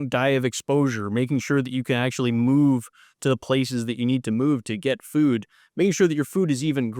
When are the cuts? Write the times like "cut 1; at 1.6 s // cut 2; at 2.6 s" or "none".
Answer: none